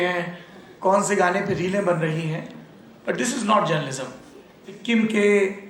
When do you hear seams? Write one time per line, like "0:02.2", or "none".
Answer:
0:04.8